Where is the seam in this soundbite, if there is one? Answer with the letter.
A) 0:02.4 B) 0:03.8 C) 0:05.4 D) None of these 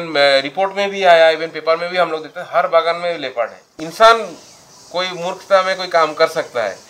B